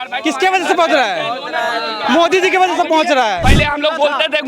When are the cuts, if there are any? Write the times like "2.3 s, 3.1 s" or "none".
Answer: 3.4 s